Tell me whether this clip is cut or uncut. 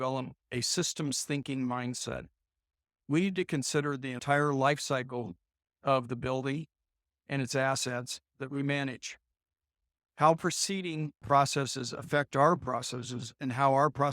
cut